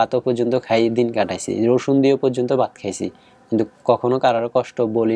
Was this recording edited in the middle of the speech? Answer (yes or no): no